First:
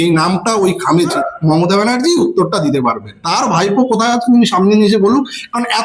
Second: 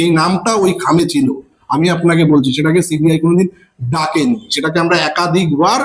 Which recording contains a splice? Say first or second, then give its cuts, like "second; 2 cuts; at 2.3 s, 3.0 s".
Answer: first; 1 cut; at 1.1 s